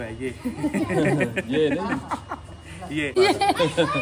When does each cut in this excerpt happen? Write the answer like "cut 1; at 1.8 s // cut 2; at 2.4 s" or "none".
cut 1; at 3.1 s